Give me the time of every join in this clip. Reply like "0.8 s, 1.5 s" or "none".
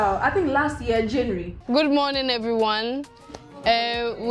1.5 s